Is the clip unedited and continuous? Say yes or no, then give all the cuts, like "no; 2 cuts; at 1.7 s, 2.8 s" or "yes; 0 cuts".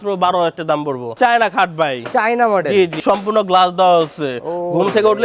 no; 2 cuts; at 1.1 s, 3.0 s